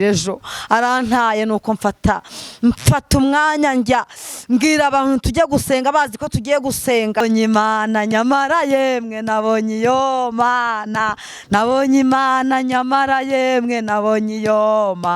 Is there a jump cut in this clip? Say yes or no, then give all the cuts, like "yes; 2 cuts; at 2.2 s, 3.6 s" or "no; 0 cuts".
yes; 1 cut; at 7.2 s